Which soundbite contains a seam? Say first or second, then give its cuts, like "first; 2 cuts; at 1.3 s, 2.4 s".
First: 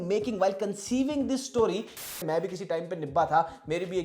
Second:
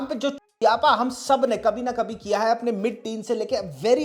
first; 1 cut; at 2.2 s